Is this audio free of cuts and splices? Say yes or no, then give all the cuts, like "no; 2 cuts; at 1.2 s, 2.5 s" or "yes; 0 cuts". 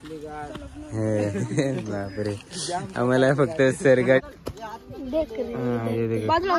no; 1 cut; at 4.4 s